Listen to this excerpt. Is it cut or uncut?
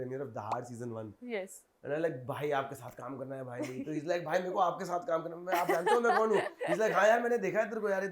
uncut